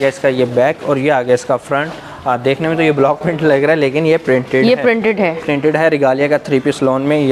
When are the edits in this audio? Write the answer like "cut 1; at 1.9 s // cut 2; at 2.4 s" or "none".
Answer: none